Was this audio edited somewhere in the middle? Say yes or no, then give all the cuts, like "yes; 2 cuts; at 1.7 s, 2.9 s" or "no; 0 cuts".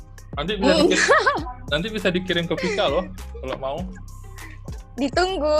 no; 0 cuts